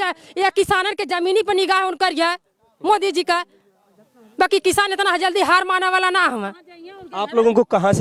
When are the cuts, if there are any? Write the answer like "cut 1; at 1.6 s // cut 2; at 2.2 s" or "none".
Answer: none